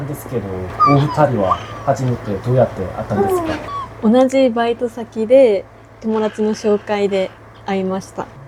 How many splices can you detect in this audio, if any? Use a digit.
0